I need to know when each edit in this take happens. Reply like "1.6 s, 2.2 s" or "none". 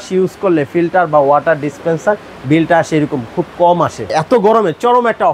4.0 s